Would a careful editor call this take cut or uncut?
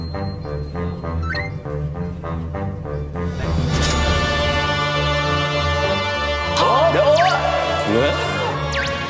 cut